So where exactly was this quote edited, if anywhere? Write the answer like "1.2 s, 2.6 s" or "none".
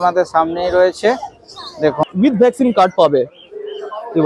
2.1 s